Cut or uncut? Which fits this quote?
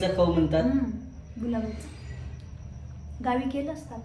uncut